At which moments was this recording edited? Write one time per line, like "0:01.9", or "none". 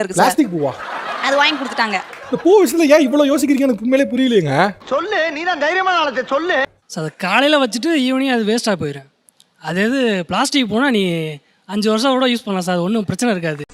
none